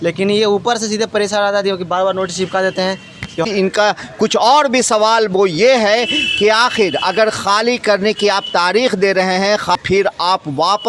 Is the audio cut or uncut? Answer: cut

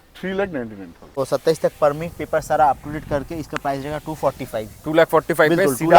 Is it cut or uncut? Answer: cut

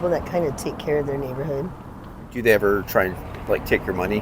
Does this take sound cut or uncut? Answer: cut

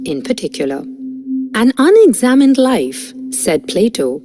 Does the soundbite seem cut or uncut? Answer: uncut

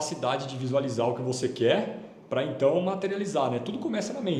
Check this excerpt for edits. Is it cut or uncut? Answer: uncut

